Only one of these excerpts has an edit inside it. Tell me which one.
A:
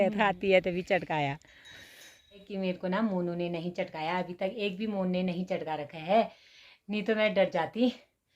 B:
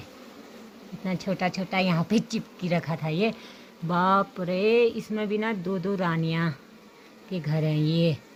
A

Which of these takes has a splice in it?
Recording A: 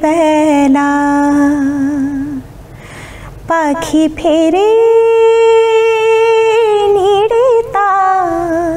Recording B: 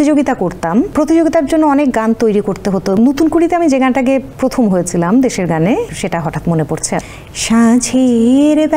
B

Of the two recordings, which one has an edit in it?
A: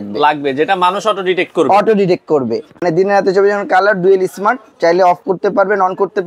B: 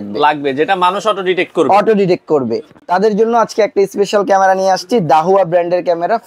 A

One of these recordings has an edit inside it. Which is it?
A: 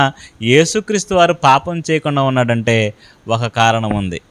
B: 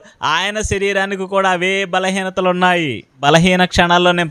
B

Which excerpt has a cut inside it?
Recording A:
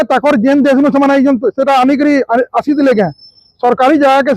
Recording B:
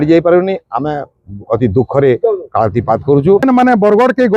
B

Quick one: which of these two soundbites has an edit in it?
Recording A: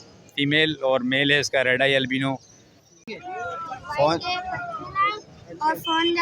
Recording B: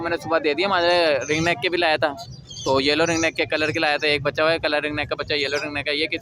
A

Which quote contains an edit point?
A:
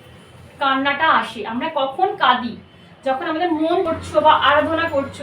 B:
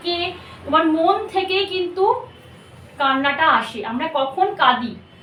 A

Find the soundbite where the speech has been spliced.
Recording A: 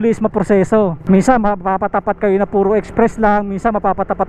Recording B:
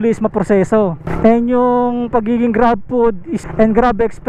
A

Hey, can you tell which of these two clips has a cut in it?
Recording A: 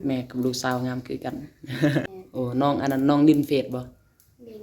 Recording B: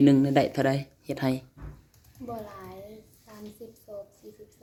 A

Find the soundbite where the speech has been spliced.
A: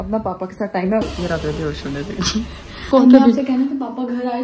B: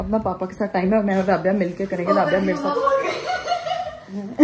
A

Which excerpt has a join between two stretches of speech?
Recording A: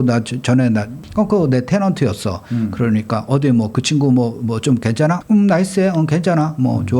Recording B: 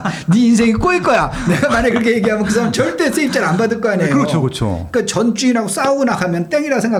A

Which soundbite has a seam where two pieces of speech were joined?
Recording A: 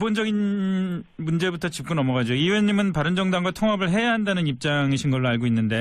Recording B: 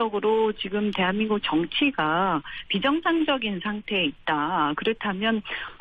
A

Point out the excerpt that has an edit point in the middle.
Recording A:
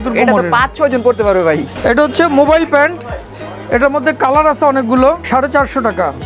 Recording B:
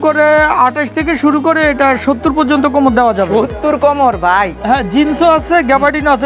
A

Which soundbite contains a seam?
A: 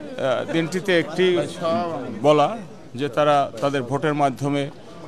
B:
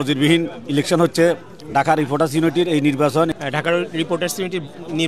B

